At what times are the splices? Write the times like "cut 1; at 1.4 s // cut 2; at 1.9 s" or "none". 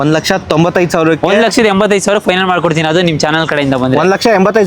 none